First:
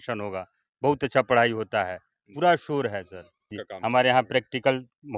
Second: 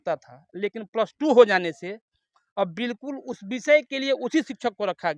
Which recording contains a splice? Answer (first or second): first